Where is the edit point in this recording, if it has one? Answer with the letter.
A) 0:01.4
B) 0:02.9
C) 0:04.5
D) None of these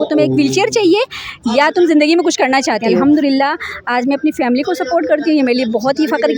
B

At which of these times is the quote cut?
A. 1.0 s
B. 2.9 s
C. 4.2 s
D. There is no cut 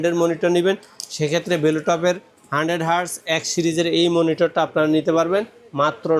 D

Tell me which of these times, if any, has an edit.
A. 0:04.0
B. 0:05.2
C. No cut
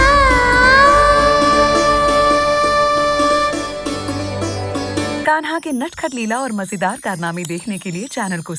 B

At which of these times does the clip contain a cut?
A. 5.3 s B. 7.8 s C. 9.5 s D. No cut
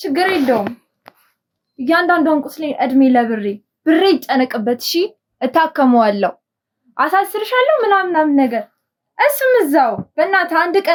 D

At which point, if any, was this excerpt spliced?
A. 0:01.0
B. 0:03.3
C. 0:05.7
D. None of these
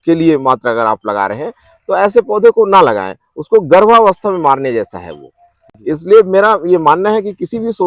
D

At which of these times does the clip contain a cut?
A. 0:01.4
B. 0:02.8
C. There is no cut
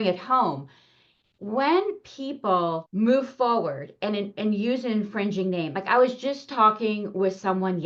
B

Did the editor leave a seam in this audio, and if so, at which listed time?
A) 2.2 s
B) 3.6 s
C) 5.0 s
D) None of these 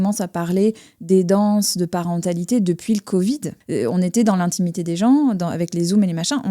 B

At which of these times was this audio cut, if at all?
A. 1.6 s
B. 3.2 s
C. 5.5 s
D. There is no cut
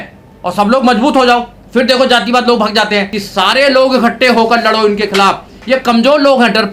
B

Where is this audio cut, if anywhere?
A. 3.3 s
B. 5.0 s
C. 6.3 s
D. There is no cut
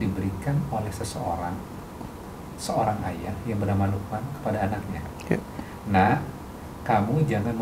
D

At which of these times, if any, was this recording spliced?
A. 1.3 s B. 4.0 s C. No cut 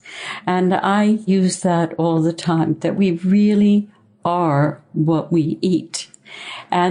A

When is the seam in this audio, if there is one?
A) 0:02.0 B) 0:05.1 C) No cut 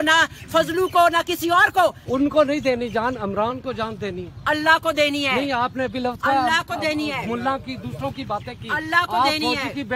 A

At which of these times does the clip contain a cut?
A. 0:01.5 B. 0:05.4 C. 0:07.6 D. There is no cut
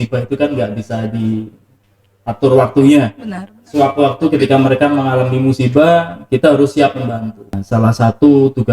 C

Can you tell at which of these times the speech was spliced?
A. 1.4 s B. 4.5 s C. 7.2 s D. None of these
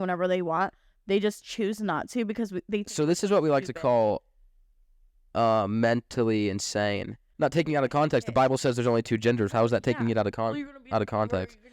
C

